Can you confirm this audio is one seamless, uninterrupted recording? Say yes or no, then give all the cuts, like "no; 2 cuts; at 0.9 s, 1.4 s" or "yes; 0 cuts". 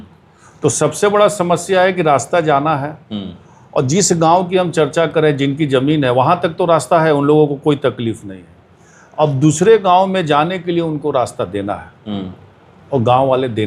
yes; 0 cuts